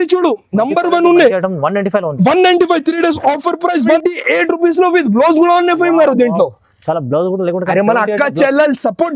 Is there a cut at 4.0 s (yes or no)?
yes